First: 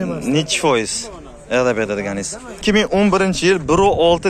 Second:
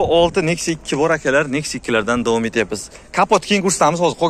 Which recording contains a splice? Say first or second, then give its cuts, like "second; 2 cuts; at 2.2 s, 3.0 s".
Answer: first; 1 cut; at 2.6 s